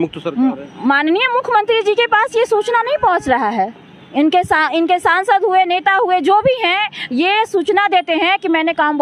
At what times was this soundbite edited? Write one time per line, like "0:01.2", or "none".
none